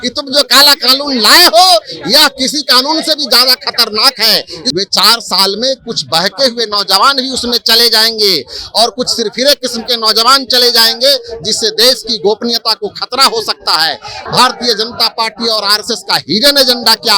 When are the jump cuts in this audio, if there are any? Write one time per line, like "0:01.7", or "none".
0:04.6
0:14.2